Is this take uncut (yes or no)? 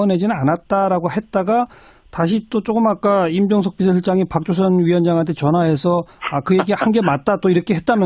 no